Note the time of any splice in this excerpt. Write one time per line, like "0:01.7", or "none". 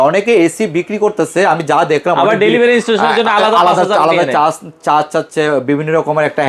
none